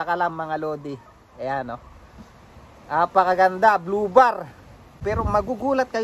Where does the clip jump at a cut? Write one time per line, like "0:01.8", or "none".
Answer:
0:05.0